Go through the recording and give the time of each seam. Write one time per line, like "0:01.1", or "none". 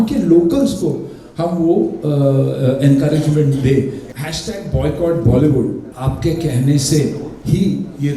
0:04.0
0:05.9
0:07.3